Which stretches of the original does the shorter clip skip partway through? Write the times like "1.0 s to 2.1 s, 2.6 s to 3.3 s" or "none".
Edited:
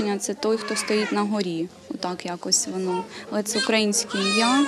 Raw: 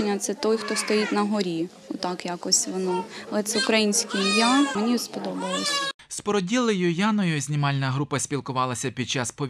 none